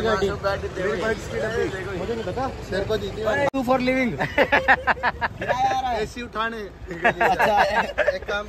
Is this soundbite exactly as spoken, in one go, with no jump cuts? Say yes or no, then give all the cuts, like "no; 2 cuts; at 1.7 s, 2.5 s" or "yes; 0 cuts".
no; 1 cut; at 3.5 s